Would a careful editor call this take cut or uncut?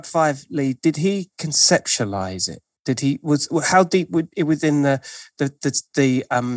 uncut